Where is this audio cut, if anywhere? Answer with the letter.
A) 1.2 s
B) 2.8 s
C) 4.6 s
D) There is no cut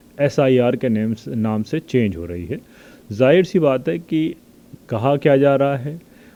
D